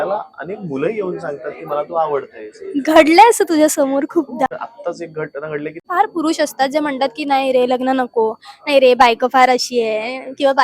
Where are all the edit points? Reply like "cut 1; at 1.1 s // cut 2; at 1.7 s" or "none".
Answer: cut 1; at 4.5 s // cut 2; at 5.8 s